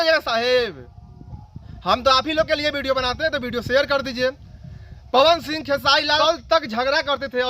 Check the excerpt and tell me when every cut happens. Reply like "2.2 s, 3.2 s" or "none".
6.2 s